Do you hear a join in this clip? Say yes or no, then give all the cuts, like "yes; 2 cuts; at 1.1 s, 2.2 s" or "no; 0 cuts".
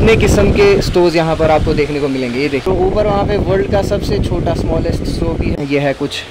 yes; 2 cuts; at 2.7 s, 5.6 s